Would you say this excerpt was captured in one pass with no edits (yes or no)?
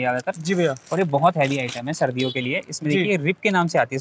yes